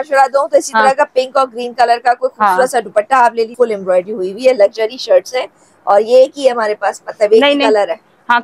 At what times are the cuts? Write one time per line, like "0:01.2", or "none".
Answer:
0:03.5